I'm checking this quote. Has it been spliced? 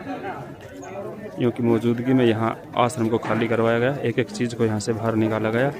no; 0 cuts

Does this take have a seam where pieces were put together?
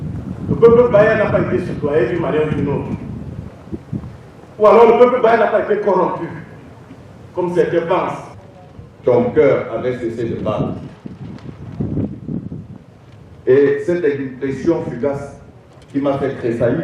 yes; 1 cut; at 8.3 s

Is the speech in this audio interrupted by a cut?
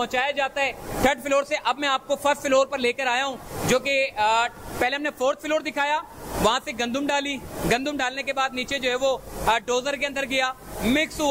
no; 0 cuts

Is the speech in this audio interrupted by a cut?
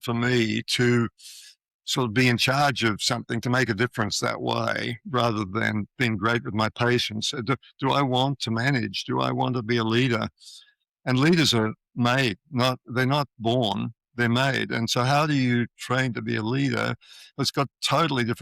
no; 0 cuts

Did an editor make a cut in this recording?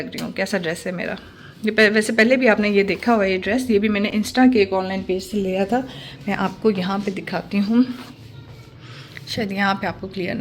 no; 0 cuts

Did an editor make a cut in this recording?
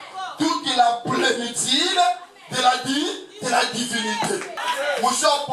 yes; 1 cut; at 4.5 s

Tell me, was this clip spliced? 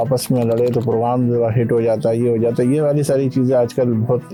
no; 0 cuts

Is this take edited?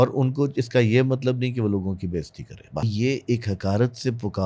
yes; 1 cut; at 2.9 s

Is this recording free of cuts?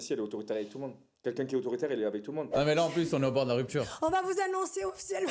no; 2 cuts; at 2.5 s, 3.9 s

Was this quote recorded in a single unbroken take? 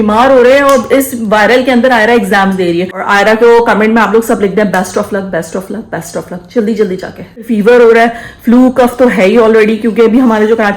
no; 2 cuts; at 3.0 s, 7.4 s

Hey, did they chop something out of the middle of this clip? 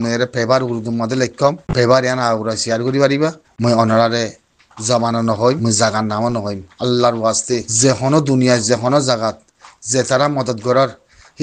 yes; 4 cuts; at 1.6 s, 3.5 s, 5.6 s, 7.7 s

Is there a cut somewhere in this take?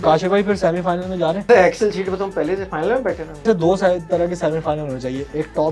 yes; 2 cuts; at 1.4 s, 3.4 s

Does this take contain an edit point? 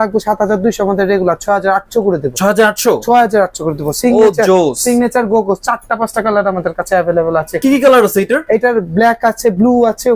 no; 0 cuts

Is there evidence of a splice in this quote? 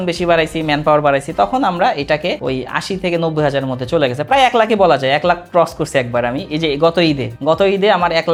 no; 0 cuts

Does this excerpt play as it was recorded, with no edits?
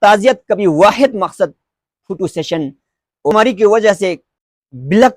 no; 1 cut; at 3.3 s

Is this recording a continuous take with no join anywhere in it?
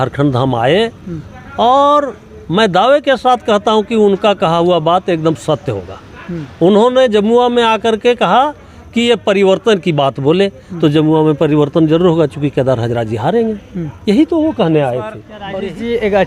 no; 1 cut; at 15.3 s

